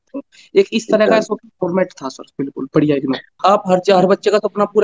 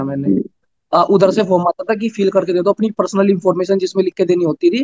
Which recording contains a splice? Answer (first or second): first